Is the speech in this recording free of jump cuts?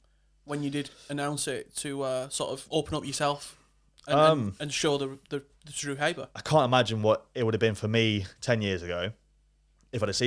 no; 2 cuts; at 2.6 s, 6.4 s

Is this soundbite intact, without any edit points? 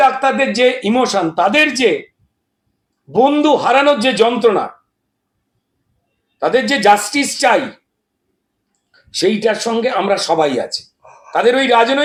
yes; 0 cuts

